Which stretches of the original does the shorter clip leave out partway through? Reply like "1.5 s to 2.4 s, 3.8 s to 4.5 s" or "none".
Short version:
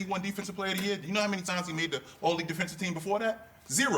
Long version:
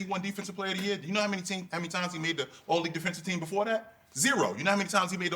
1.4 s to 1.9 s